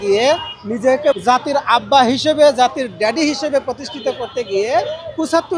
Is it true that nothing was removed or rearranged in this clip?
no; 1 cut; at 1.2 s

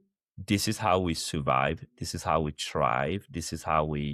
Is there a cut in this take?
no; 0 cuts

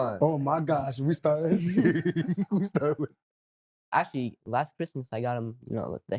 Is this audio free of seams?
no; 1 cut; at 3.8 s

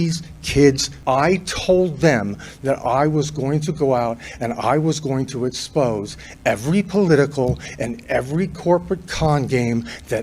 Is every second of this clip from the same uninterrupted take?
no; 1 cut; at 0.9 s

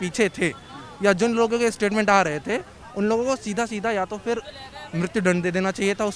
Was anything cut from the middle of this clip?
no; 0 cuts

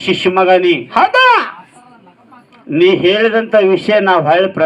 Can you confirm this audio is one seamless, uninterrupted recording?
yes; 0 cuts

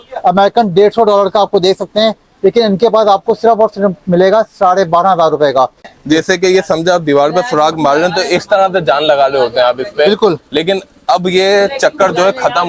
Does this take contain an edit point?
yes; 1 cut; at 5.9 s

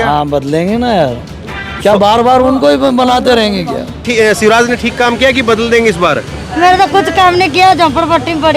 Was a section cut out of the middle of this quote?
yes; 1 cut; at 4.1 s

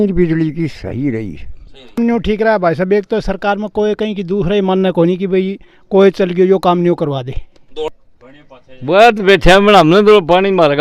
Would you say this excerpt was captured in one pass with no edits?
no; 2 cuts; at 2.0 s, 7.9 s

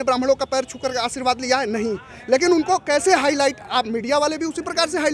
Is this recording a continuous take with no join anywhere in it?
yes; 0 cuts

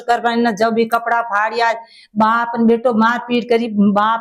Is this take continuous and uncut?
yes; 0 cuts

